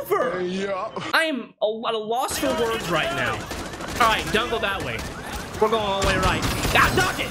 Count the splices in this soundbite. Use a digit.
0